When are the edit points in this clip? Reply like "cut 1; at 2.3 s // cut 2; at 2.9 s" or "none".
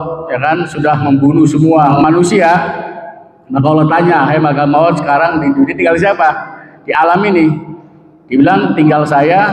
cut 1; at 1.9 s